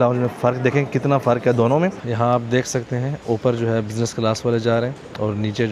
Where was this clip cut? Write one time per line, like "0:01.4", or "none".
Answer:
0:02.0